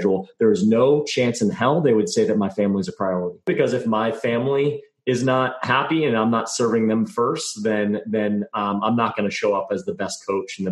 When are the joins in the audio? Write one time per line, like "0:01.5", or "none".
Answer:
0:03.5